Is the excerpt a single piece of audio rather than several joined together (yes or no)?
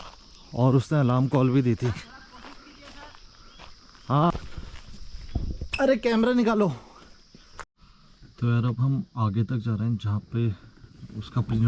no